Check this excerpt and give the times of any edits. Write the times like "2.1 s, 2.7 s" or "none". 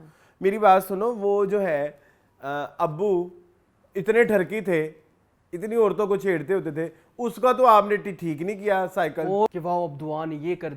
9.5 s